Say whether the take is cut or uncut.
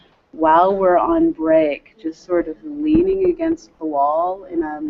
cut